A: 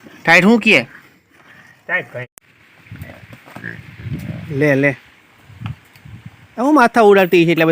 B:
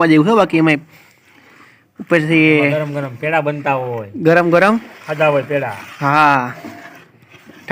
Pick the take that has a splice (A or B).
A